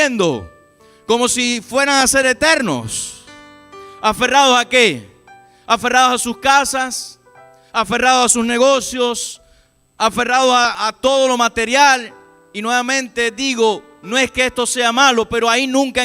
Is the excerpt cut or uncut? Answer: cut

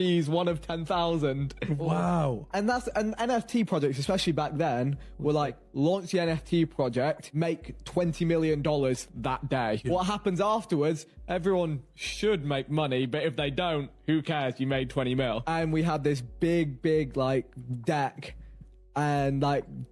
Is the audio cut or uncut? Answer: uncut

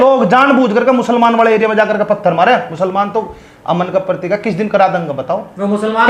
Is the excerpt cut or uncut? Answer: uncut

